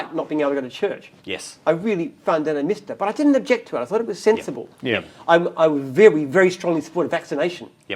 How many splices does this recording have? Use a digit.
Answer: 0